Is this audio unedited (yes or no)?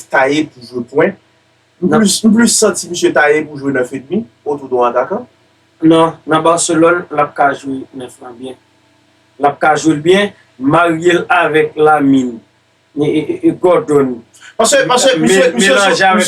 yes